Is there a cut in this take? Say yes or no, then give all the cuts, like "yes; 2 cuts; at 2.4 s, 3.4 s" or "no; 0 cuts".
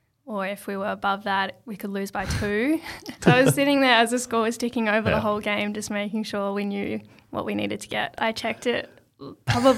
yes; 2 cuts; at 3.1 s, 8.1 s